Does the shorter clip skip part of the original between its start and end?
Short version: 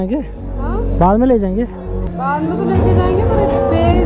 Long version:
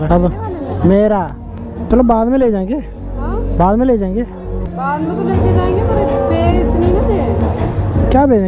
no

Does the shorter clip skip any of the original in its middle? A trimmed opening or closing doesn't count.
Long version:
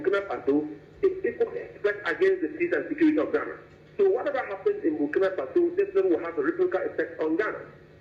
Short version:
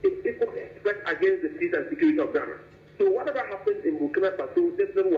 no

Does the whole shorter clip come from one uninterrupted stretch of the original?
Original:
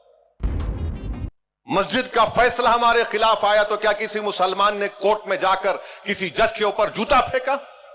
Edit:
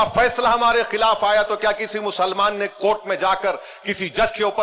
yes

